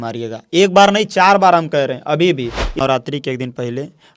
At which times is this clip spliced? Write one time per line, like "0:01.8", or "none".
0:02.8